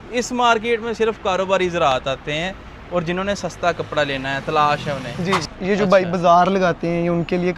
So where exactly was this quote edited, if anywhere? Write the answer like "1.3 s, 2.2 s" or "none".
5.5 s